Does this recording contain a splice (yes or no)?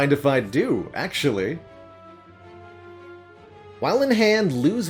no